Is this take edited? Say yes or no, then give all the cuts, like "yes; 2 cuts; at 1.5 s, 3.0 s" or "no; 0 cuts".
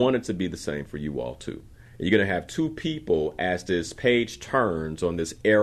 no; 0 cuts